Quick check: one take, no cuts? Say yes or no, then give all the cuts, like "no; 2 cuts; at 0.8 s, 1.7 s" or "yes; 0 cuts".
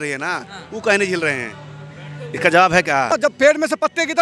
no; 1 cut; at 3.1 s